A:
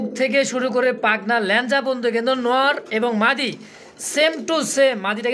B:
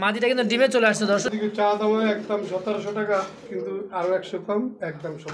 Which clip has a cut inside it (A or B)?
B